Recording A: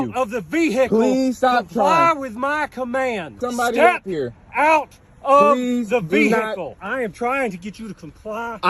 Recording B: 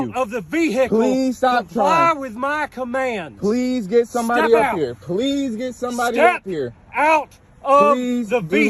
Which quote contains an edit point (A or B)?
A